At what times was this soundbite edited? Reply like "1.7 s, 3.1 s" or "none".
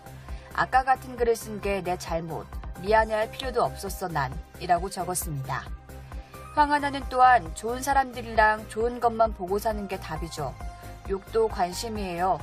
none